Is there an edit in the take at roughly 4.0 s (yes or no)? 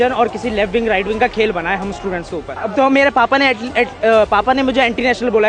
no